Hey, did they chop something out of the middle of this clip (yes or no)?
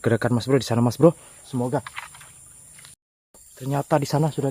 yes